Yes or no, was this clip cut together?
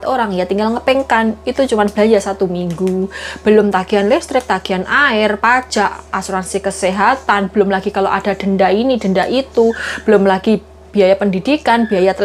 no